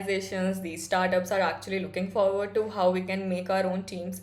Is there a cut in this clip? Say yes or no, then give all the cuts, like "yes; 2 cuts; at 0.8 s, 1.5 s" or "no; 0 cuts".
no; 0 cuts